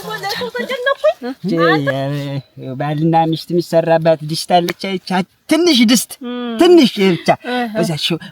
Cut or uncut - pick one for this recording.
cut